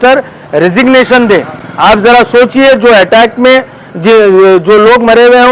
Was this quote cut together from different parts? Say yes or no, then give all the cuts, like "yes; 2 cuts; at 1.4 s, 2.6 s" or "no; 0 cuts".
no; 0 cuts